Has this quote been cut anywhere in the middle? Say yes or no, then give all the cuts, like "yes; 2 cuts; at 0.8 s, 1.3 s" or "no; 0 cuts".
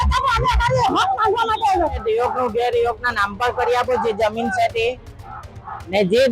yes; 1 cut; at 2.0 s